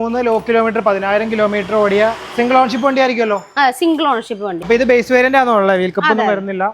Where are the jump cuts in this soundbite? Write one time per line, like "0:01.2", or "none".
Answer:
0:04.7